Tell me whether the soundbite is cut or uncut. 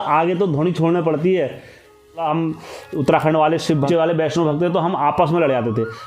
cut